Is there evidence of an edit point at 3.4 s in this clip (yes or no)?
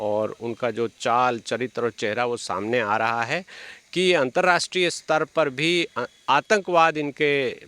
no